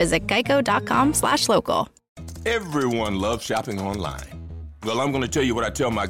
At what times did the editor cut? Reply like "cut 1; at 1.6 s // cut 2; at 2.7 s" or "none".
cut 1; at 2.2 s